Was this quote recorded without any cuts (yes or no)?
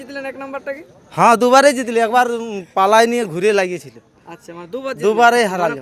yes